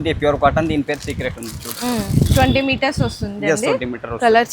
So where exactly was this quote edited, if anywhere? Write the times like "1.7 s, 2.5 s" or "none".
none